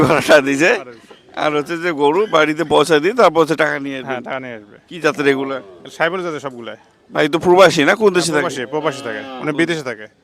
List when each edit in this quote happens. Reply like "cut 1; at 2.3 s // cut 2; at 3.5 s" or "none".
none